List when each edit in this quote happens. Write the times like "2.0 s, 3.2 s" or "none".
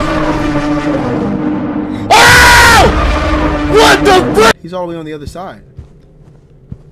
4.5 s